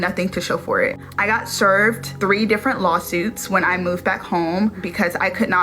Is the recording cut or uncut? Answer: uncut